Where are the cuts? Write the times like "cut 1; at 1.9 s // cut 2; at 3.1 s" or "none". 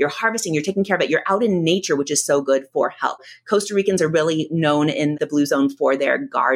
cut 1; at 3.2 s // cut 2; at 5.2 s